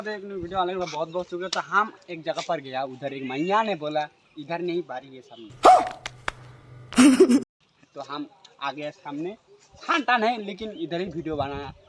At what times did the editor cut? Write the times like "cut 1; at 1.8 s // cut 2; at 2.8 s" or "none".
none